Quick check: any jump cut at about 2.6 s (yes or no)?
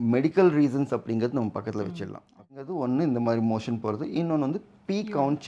yes